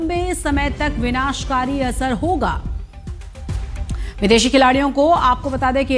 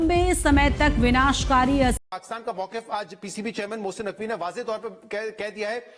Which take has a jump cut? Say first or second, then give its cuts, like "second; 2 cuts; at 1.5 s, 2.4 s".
second; 1 cut; at 2.0 s